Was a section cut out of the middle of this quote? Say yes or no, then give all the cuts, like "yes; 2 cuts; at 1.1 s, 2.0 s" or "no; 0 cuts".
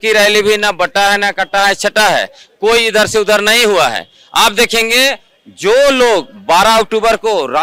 no; 0 cuts